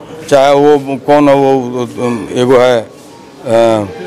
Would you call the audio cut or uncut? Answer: uncut